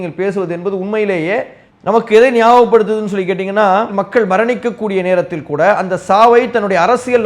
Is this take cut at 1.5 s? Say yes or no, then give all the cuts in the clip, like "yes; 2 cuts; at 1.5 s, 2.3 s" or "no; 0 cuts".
no; 1 cut; at 3.9 s